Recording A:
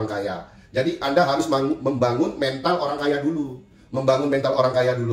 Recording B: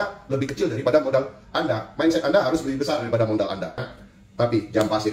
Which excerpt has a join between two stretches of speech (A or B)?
B